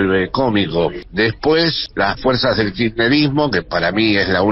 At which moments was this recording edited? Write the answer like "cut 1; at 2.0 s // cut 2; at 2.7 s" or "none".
cut 1; at 1.0 s // cut 2; at 1.8 s